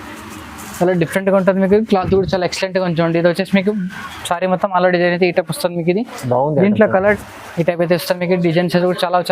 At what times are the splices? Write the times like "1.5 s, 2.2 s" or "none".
6.9 s